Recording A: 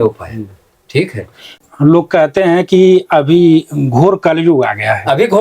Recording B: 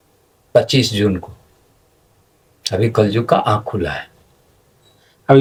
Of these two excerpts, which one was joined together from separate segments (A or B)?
A